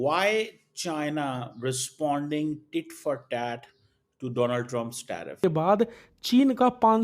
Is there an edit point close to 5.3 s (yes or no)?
yes